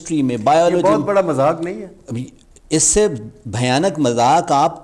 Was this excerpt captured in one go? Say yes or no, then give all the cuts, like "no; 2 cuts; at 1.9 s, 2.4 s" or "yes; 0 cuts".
yes; 0 cuts